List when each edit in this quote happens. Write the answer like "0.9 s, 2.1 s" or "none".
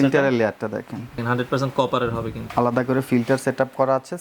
1.2 s, 2.4 s